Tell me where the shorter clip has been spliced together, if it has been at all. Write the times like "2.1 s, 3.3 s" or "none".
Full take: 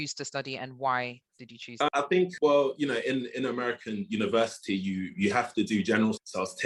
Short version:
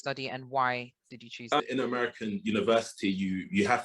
1.6 s